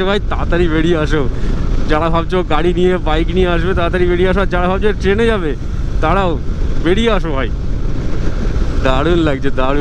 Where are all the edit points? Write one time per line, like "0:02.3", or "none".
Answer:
none